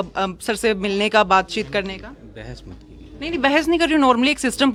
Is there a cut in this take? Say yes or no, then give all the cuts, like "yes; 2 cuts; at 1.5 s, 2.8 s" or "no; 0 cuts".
no; 0 cuts